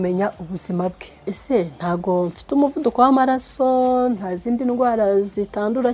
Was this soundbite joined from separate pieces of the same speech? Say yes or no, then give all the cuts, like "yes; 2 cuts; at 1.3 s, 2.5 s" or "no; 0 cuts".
yes; 1 cut; at 1.3 s